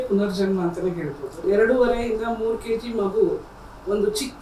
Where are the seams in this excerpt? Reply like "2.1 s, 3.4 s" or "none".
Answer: 1.4 s